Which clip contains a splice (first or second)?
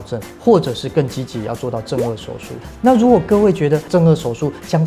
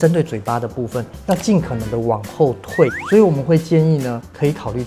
first